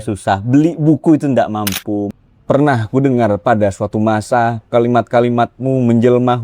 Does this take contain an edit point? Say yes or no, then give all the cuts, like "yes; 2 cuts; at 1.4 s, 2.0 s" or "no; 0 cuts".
yes; 1 cut; at 2.1 s